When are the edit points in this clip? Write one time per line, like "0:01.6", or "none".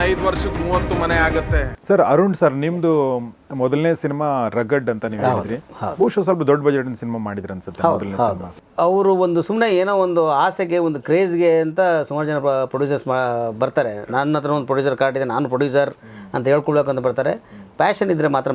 0:01.7
0:08.6